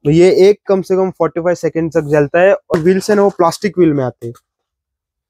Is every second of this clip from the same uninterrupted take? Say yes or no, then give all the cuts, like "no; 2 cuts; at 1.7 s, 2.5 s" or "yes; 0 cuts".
no; 1 cut; at 2.8 s